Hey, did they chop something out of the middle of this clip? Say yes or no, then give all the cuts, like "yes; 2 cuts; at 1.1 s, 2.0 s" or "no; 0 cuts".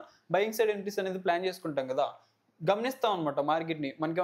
no; 0 cuts